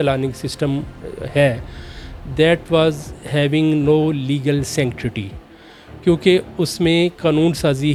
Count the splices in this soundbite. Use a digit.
0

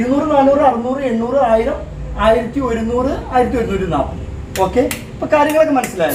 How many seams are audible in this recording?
0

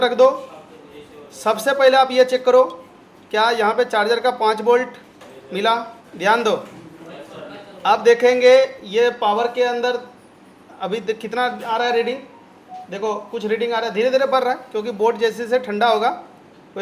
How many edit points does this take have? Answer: 1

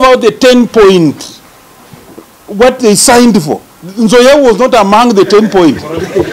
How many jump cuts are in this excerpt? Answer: 0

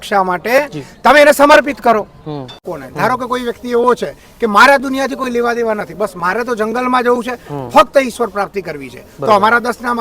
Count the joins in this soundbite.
1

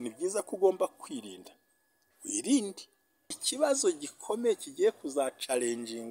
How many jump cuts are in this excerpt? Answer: 1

